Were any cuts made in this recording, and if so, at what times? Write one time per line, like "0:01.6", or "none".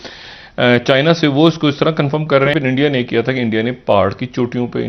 0:02.5